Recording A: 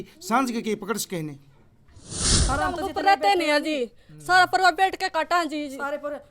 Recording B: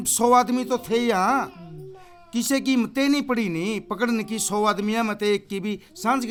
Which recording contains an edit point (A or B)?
A